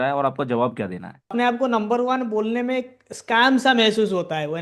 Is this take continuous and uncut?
no; 1 cut; at 1.3 s

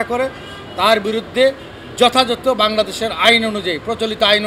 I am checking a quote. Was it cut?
no; 0 cuts

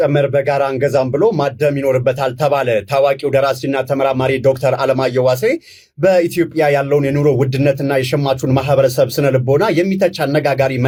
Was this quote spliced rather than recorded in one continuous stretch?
no; 0 cuts

